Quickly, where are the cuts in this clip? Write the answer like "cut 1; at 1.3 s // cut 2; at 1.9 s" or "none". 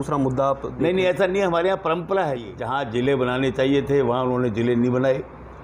cut 1; at 2.6 s